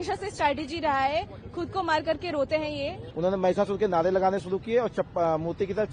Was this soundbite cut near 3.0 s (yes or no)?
yes